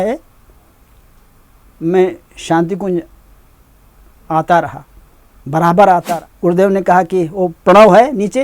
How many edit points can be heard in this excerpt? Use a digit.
1